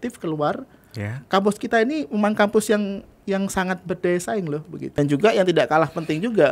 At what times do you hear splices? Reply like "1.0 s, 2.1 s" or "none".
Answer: 4.9 s